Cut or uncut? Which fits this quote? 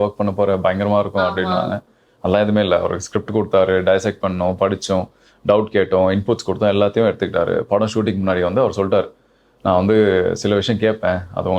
uncut